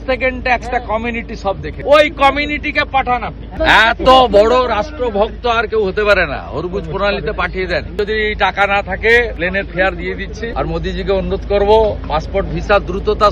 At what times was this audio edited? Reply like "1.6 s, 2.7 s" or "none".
1.7 s, 3.5 s, 7.9 s, 9.3 s, 10.5 s